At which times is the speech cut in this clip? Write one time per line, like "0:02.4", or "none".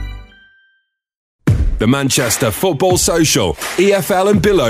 0:01.3